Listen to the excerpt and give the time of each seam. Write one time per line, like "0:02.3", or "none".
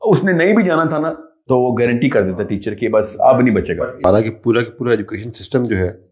0:04.0